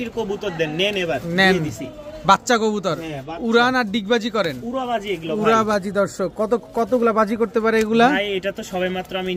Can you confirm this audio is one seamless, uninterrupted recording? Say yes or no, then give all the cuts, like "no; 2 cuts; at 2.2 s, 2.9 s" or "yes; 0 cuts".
yes; 0 cuts